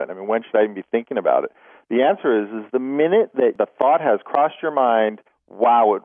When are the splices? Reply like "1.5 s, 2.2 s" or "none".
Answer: 3.5 s